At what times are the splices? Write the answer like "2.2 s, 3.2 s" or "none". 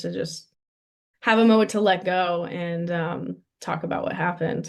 none